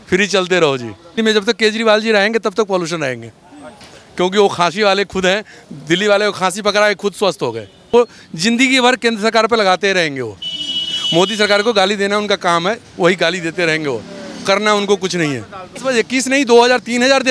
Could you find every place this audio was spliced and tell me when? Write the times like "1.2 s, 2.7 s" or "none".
1.0 s, 7.9 s, 15.8 s